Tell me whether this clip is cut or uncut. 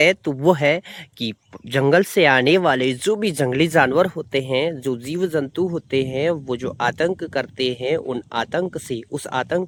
uncut